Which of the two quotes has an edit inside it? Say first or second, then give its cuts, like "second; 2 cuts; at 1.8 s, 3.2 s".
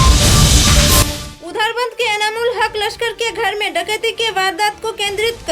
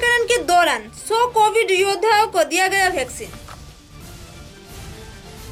first; 1 cut; at 1.1 s